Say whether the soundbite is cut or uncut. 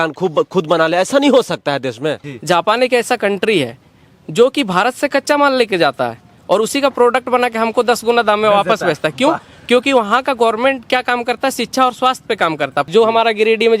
cut